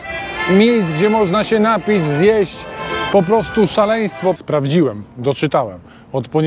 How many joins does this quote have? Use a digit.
1